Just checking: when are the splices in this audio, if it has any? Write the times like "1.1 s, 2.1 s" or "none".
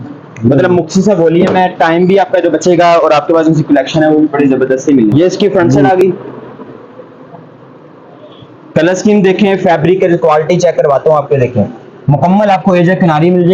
5.5 s